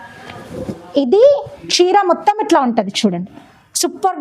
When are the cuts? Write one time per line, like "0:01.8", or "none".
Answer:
none